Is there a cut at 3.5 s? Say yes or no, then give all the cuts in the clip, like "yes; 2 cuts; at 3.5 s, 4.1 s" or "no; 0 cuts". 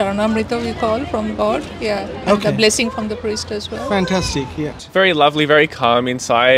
no; 1 cut; at 4.8 s